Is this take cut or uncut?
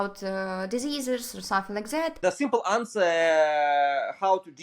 cut